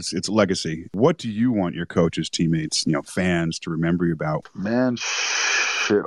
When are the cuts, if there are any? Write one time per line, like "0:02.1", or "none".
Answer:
0:00.9
0:04.4